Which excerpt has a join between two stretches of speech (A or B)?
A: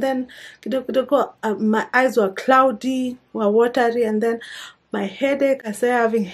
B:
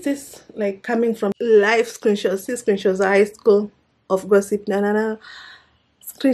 B